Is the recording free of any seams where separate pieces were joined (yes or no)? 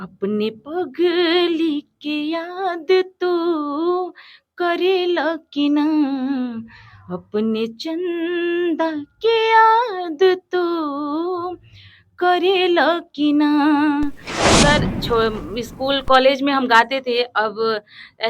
no